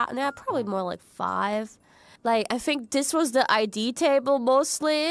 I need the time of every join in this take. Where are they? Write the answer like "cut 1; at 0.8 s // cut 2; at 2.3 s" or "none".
cut 1; at 2.0 s